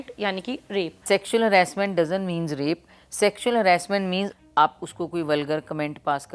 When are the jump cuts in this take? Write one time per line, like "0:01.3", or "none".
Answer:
0:01.1
0:04.3